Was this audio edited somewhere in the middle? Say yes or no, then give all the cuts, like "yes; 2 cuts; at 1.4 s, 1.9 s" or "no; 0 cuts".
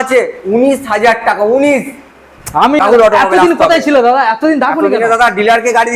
yes; 1 cut; at 2.8 s